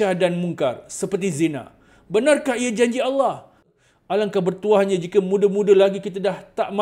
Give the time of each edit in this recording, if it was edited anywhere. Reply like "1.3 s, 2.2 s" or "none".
3.7 s